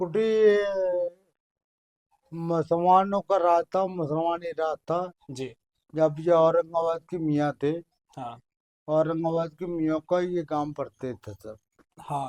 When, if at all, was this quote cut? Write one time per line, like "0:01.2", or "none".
none